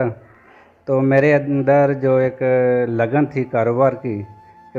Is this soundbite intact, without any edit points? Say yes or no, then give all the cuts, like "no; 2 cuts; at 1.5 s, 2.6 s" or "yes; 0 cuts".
yes; 0 cuts